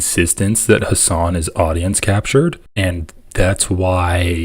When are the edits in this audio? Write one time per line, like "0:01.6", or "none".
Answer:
0:02.7

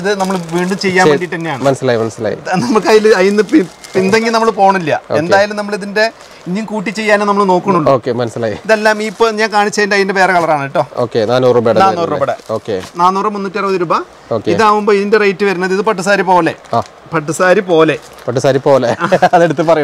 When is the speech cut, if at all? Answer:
none

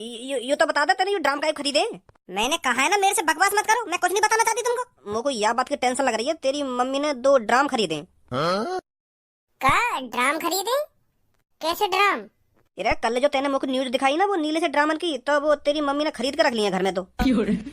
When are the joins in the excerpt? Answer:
0:05.0

